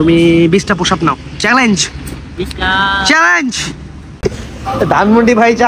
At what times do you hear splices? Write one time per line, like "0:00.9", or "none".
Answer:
0:04.0